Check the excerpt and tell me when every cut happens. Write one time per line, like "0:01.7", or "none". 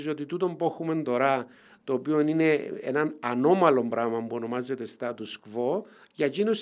none

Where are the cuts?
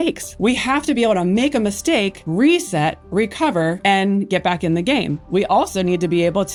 none

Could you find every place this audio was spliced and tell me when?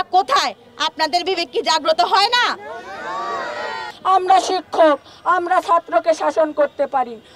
0:03.9

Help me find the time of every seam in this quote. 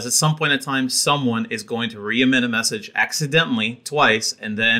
none

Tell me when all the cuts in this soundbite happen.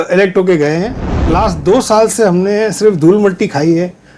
0:01.0

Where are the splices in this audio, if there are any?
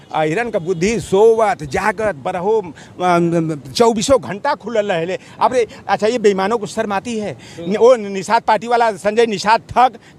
none

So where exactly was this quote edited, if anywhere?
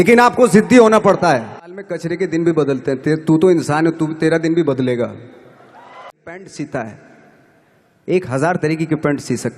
0:02.0
0:06.3

